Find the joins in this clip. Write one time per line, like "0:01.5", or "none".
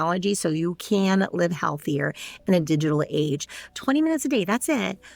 0:03.7